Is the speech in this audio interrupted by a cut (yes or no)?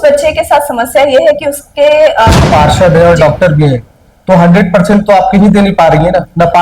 yes